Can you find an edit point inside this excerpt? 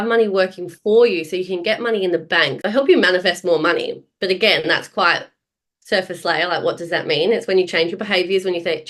yes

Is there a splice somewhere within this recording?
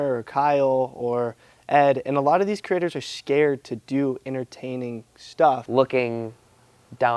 yes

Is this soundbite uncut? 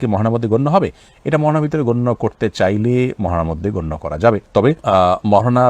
yes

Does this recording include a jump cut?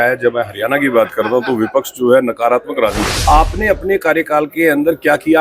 yes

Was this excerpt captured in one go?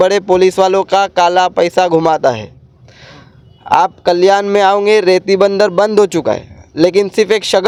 yes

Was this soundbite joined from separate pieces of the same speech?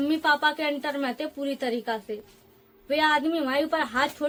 no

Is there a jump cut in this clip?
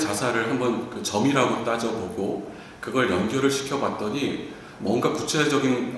no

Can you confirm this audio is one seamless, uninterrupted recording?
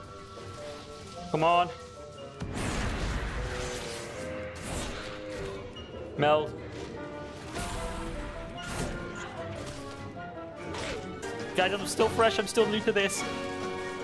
no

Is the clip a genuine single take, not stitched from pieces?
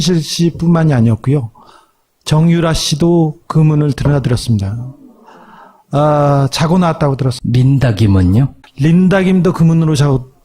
no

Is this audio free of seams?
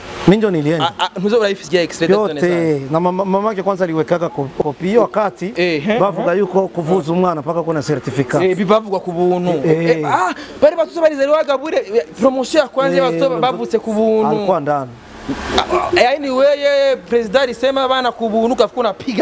no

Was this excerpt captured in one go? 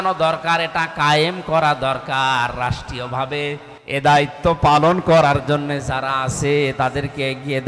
no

